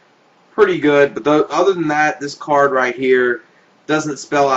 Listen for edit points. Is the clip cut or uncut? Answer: cut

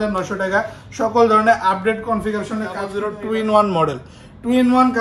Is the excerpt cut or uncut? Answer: cut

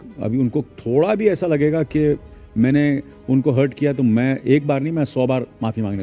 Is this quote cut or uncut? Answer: uncut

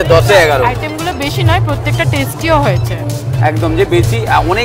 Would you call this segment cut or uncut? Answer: uncut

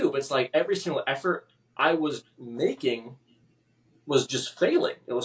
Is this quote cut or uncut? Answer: uncut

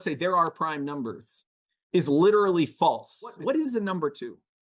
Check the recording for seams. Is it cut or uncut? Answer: cut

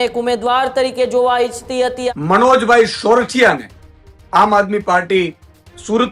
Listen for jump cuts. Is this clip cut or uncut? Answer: cut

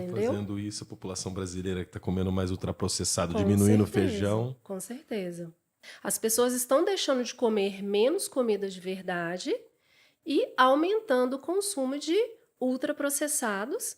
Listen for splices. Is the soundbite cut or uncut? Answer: cut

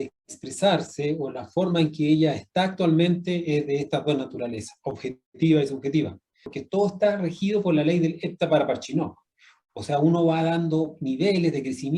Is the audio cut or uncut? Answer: cut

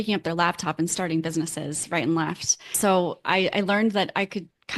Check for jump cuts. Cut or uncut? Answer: cut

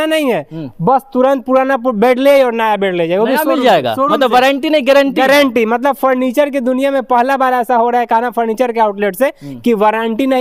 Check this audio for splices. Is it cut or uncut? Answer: uncut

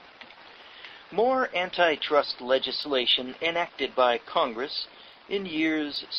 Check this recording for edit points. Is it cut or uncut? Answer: uncut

